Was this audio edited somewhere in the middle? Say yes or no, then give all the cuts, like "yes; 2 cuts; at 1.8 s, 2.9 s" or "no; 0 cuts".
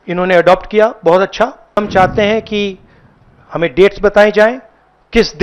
yes; 1 cut; at 1.8 s